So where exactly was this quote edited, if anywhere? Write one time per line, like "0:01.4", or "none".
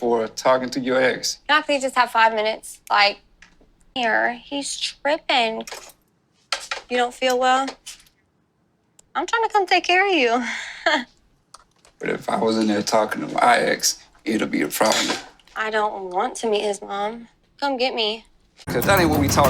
0:03.9
0:18.6